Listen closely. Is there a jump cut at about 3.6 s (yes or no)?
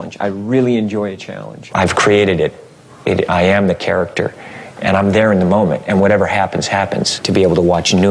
no